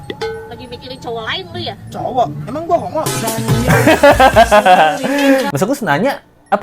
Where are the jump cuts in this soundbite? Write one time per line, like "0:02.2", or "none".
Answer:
0:05.5